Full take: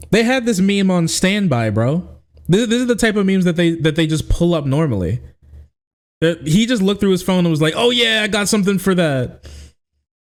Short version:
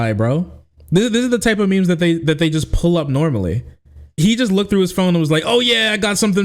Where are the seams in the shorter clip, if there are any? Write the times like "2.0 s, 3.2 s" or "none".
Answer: 4.1 s